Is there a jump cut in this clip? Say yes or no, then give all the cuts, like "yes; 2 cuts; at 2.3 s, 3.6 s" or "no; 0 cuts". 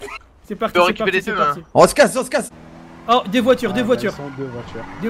yes; 1 cut; at 2.5 s